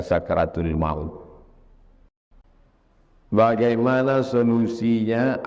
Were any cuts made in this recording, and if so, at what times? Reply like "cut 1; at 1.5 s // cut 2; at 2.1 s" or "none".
cut 1; at 2.4 s